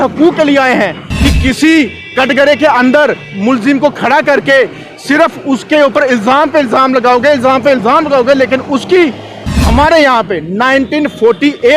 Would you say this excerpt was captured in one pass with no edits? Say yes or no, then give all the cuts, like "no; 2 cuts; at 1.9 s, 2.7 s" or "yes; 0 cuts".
no; 2 cuts; at 1.0 s, 9.4 s